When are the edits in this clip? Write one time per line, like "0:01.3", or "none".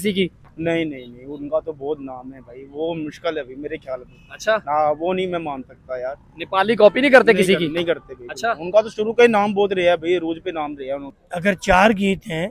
0:11.1